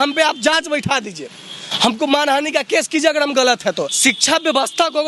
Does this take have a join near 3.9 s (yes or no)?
yes